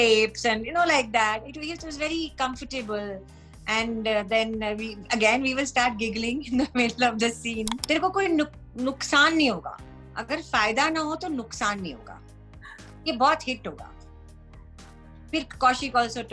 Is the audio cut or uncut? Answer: cut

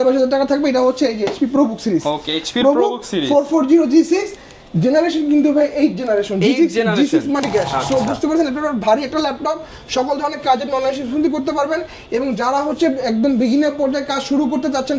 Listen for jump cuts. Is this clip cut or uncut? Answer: cut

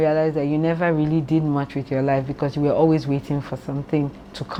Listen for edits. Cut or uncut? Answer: uncut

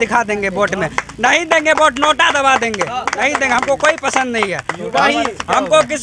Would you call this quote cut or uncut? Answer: uncut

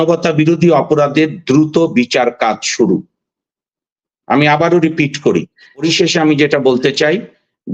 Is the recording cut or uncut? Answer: cut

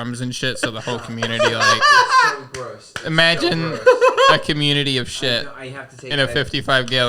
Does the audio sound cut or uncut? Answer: uncut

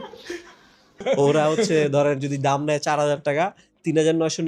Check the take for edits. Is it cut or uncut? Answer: cut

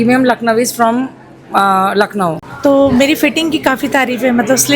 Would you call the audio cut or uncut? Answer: cut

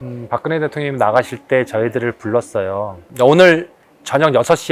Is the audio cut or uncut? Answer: uncut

